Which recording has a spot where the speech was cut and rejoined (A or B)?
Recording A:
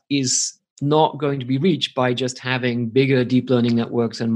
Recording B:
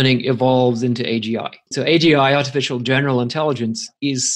B